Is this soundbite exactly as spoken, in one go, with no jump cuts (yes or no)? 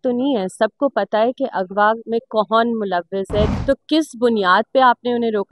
no